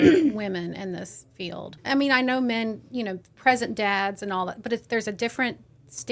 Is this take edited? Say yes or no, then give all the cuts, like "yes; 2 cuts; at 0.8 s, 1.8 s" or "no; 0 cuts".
yes; 1 cut; at 1.7 s